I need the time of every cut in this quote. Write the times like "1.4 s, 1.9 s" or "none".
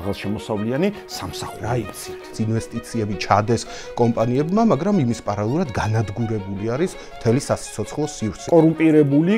2.4 s, 8.4 s